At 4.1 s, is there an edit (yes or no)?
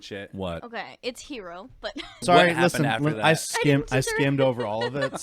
no